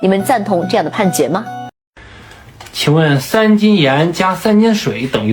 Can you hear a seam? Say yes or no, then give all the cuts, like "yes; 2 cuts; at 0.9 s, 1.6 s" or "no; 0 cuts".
yes; 1 cut; at 1.8 s